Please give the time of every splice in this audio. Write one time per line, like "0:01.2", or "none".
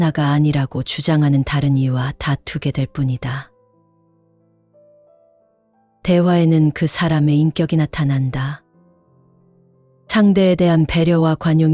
0:03.5
0:05.9

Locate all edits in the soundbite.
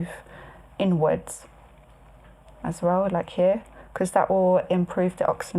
none

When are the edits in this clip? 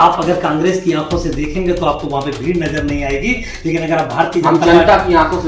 none

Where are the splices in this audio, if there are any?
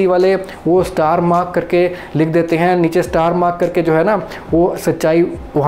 none

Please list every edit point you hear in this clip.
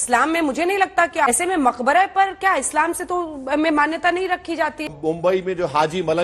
0:01.3
0:04.9

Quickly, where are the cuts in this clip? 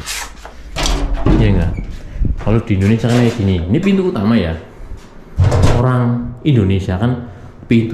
0:05.8

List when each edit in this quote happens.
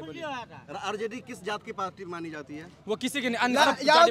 0:01.0

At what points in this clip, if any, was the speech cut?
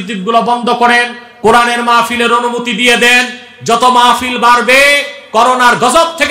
none

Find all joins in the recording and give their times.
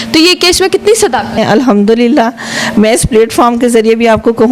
0:01.4

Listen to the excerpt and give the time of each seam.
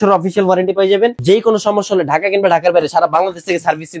none

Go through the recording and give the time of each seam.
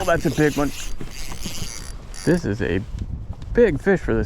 0:01.7

